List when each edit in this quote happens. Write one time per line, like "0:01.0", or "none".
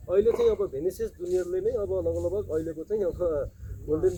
none

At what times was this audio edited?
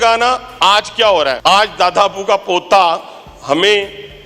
0:01.4

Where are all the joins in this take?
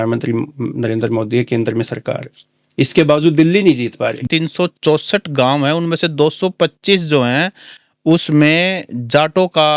0:04.2

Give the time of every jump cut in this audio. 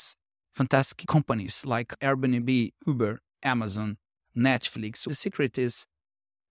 0:05.0

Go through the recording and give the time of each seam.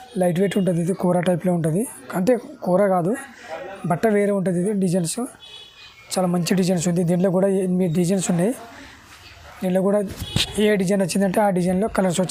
none

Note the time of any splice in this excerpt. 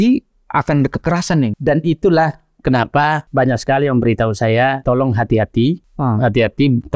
0:01.5
0:03.2
0:04.8
0:05.9

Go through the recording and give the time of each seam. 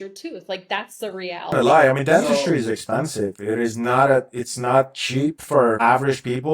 0:01.5

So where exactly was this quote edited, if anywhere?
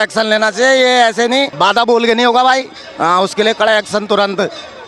0:01.5

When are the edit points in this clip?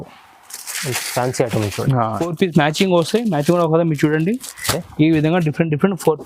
0:02.2

